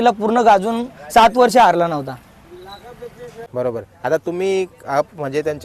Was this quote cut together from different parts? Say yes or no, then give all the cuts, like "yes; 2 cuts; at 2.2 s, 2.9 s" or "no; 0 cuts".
yes; 1 cut; at 3.3 s